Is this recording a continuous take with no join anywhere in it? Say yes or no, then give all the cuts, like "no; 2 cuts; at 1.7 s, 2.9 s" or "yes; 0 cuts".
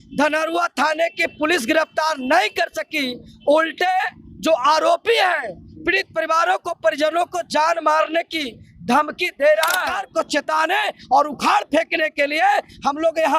no; 1 cut; at 9.9 s